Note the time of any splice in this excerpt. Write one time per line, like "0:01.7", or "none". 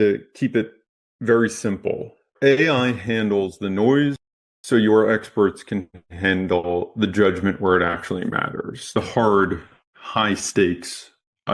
0:02.2